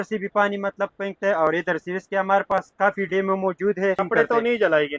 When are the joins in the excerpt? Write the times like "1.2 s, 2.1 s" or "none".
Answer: 4.0 s